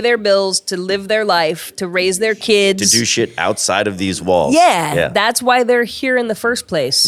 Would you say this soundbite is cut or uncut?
uncut